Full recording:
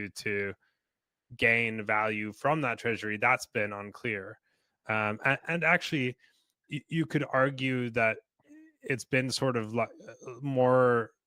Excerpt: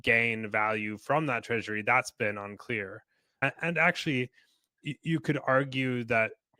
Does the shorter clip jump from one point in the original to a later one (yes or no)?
yes